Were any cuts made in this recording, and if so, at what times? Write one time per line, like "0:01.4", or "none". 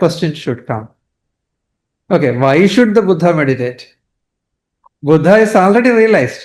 none